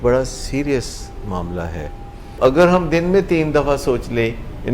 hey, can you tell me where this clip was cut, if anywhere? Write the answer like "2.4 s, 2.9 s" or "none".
2.4 s